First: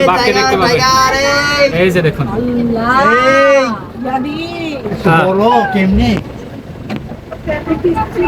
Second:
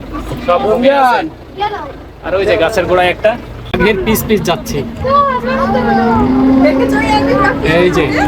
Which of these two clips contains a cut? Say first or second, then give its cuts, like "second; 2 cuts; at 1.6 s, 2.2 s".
second; 1 cut; at 3.8 s